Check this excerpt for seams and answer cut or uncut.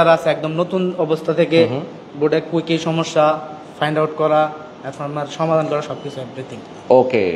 uncut